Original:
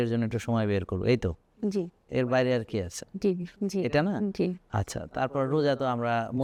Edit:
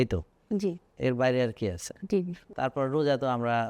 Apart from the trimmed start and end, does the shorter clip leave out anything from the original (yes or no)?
yes